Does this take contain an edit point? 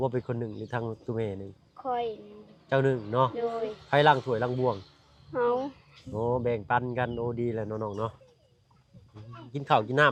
no; 0 cuts

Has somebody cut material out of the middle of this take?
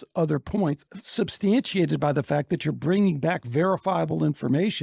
yes; 1 cut; at 0.9 s

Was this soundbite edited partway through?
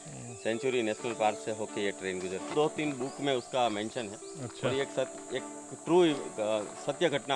yes; 1 cut; at 2.5 s

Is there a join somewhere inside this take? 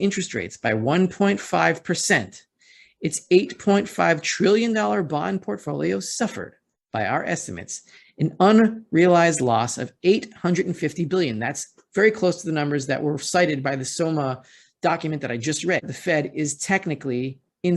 yes; 1 cut; at 15.9 s

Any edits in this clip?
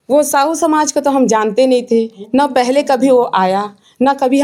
no; 0 cuts

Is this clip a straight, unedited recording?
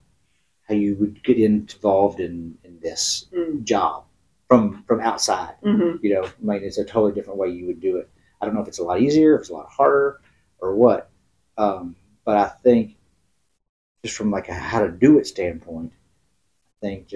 yes; 0 cuts

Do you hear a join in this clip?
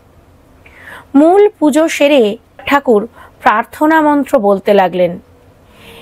yes; 1 cut; at 2.6 s

